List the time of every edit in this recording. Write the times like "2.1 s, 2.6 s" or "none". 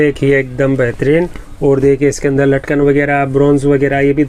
none